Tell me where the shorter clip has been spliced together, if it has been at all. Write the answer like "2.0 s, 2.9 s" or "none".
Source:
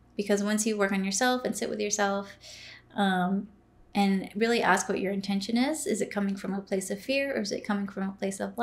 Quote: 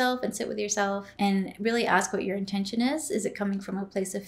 1.1 s